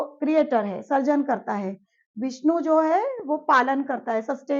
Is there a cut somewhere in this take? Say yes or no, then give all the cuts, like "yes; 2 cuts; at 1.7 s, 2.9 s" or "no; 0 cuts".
no; 0 cuts